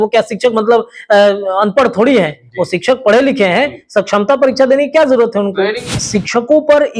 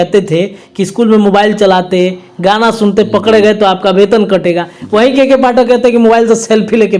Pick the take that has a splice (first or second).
first